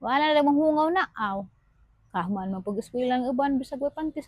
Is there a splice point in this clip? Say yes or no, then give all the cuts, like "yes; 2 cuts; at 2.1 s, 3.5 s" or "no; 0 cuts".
no; 0 cuts